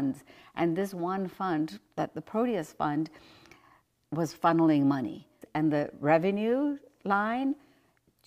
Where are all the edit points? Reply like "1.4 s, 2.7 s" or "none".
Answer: 5.4 s